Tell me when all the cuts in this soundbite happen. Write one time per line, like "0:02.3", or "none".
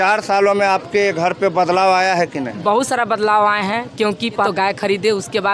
0:04.5